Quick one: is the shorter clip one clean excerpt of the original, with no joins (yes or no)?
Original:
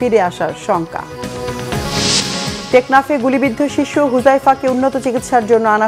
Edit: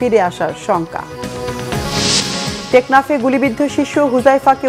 yes